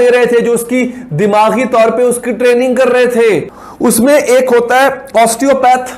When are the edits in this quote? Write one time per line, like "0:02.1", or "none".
0:03.5